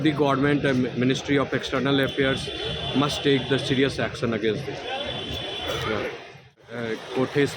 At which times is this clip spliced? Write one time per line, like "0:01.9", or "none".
0:06.6